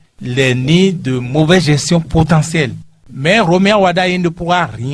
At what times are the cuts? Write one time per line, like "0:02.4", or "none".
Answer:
0:03.1